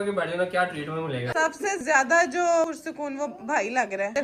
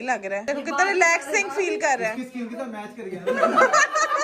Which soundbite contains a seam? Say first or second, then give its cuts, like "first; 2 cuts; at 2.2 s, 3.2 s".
first; 2 cuts; at 1.3 s, 2.7 s